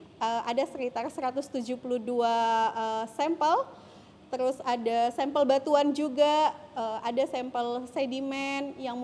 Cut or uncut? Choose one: uncut